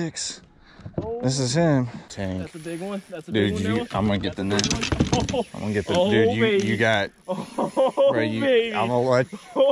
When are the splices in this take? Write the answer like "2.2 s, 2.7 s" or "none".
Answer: 2.1 s